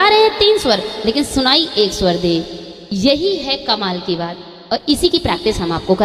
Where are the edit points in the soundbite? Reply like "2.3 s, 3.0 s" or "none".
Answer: none